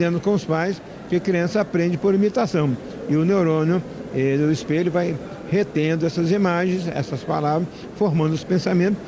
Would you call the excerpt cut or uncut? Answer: uncut